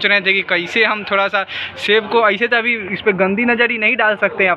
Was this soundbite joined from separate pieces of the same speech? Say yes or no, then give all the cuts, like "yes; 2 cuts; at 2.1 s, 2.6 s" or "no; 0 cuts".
no; 0 cuts